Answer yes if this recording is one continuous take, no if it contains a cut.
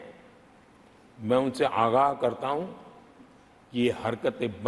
yes